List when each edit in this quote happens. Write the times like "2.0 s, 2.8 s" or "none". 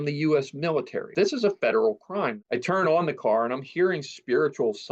1.1 s, 2.4 s